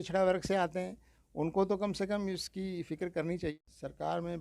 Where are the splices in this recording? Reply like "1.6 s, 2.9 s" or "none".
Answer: 3.5 s